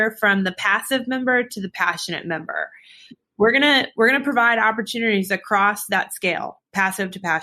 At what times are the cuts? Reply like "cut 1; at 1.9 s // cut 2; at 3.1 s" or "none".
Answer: none